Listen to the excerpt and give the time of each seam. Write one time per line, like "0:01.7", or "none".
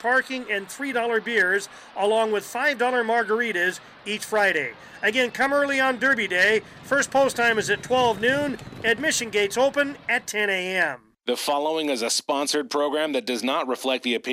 0:11.1

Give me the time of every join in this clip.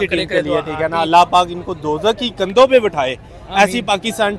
none

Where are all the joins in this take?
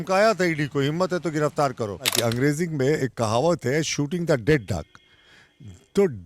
0:02.1

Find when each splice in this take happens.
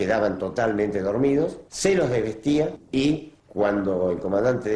0:01.6
0:03.4

